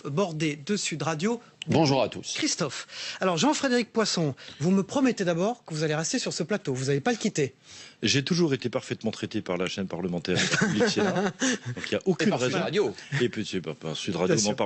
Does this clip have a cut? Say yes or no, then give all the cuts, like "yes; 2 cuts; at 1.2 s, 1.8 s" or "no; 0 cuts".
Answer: yes; 1 cut; at 13.3 s